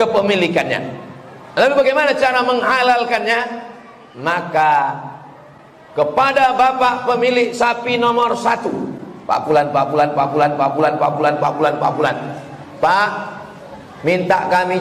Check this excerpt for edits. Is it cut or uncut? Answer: uncut